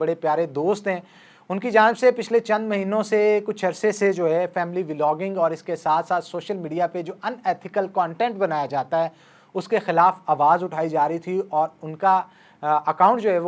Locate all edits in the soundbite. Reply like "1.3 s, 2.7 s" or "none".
none